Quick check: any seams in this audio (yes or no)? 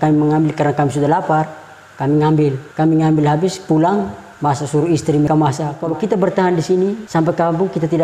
yes